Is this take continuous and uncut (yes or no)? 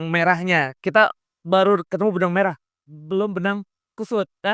yes